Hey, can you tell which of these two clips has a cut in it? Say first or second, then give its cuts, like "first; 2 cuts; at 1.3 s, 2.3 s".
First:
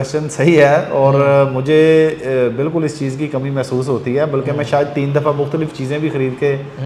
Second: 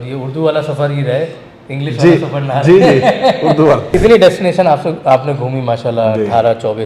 second; 1 cut; at 3.9 s